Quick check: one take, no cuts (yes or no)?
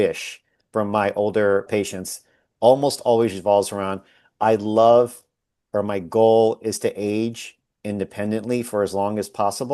no